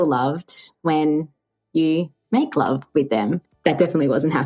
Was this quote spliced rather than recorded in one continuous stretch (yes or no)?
yes